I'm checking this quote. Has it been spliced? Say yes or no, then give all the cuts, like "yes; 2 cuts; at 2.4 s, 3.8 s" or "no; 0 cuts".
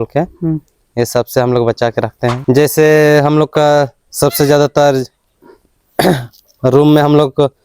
yes; 1 cut; at 2.4 s